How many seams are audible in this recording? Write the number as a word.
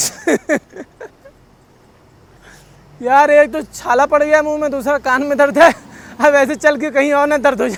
zero